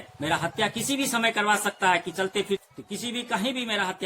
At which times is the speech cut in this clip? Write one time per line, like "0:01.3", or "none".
0:02.6